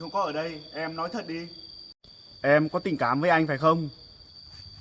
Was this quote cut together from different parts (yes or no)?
no